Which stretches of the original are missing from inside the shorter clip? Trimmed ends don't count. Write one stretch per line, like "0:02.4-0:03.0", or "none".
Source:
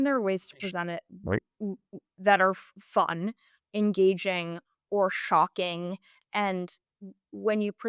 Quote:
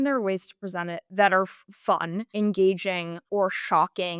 0:01.0-0:02.1
0:03.3-0:03.6
0:04.5-0:04.7